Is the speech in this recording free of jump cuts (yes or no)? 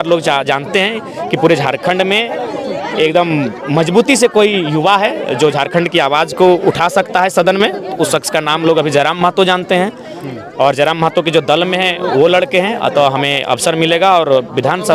yes